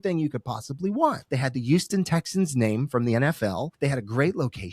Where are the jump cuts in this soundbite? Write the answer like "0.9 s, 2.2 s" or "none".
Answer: 1.2 s, 3.7 s

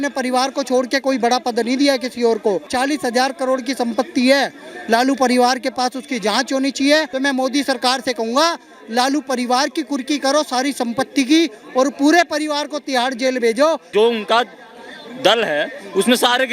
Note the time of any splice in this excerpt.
2.7 s, 7.1 s, 13.8 s

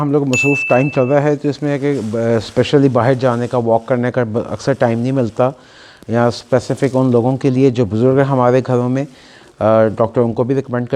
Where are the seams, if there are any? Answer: none

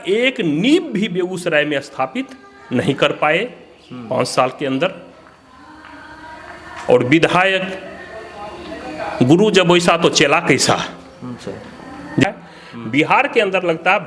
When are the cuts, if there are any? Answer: 12.2 s

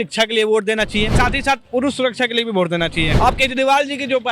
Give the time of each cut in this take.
1.1 s, 3.1 s

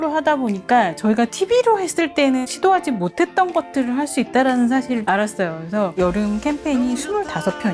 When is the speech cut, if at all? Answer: 2.5 s, 5.7 s

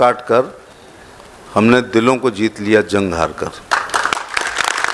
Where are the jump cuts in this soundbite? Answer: none

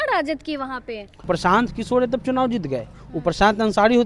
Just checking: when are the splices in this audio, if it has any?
1.2 s

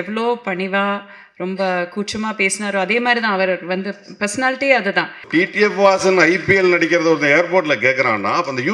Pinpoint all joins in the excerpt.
5.3 s

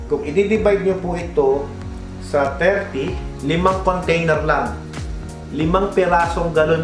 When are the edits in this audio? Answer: 3.3 s

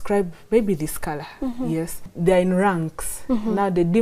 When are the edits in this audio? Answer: 2.1 s

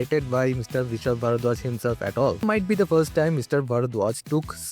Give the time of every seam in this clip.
2.4 s

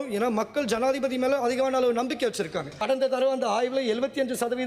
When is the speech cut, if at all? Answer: 2.7 s

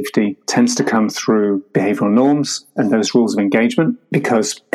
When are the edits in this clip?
none

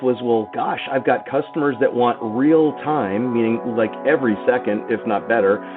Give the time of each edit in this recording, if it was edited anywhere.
none

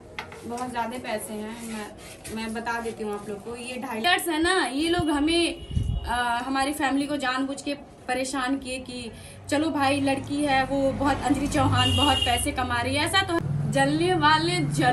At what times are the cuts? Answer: 4.0 s, 13.4 s

